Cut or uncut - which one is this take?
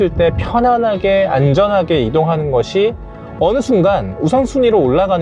uncut